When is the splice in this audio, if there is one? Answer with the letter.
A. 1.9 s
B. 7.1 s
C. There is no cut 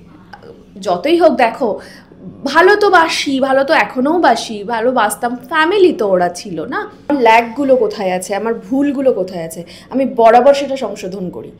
B